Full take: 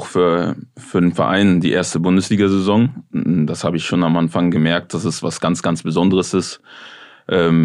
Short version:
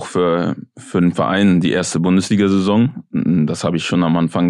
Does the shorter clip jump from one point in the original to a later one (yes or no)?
no